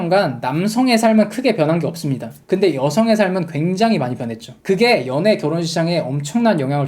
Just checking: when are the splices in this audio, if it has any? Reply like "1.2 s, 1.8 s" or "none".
2.3 s